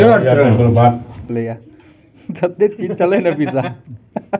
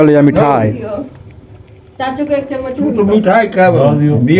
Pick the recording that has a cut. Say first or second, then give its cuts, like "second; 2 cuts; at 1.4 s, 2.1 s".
first; 1 cut; at 1.4 s